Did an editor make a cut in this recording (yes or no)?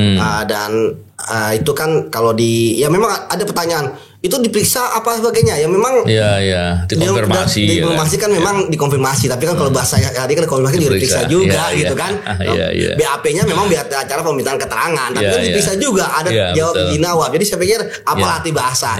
no